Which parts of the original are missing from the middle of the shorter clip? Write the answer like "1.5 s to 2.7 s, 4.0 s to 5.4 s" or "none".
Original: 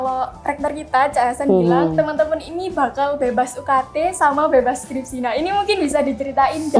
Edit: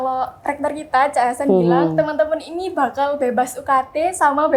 none